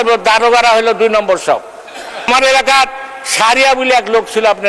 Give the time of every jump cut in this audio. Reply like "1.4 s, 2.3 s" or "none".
2.3 s